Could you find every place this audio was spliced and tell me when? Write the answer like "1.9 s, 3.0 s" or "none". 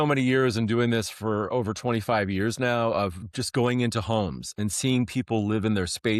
none

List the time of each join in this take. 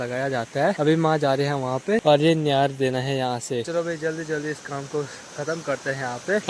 none

